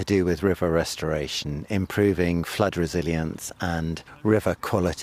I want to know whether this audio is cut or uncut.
cut